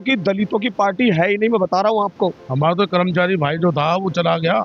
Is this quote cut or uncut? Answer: cut